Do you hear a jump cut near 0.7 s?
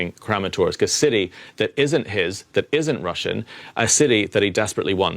no; 0 cuts

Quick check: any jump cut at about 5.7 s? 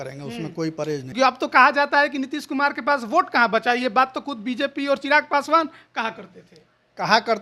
no; 1 cut; at 1.1 s

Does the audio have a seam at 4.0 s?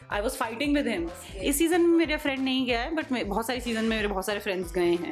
no; 1 cut; at 1.3 s

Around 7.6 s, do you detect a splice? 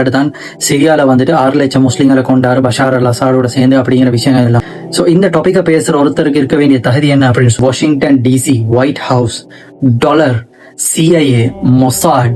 yes; 1 cut; at 7.6 s

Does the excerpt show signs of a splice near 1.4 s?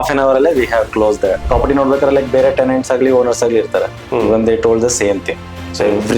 yes; 1 cut; at 1.4 s

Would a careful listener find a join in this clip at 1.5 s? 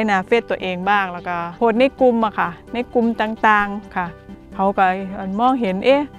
yes; 1 cut; at 1.5 s

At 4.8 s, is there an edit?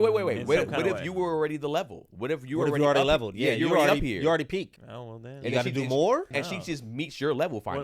yes; 2 cuts; at 4.8 s, 6.3 s

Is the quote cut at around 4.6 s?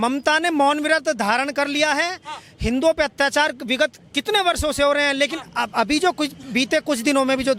no; 0 cuts

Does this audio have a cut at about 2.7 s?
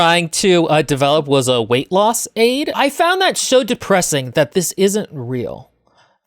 yes; 1 cut; at 2.7 s

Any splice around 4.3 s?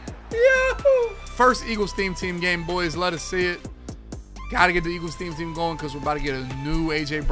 no; 1 cut; at 1.2 s

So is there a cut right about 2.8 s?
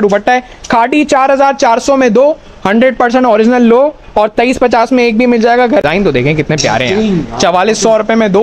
no; 1 cut; at 5.9 s

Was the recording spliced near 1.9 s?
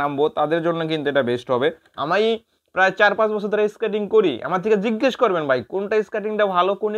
yes; 1 cut; at 1.9 s

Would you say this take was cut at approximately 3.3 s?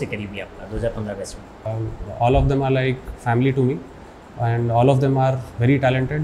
no; 1 cut; at 1.6 s

